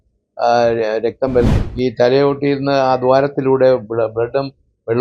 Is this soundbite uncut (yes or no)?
no